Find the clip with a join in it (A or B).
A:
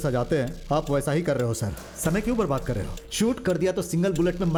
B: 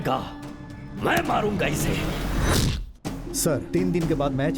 B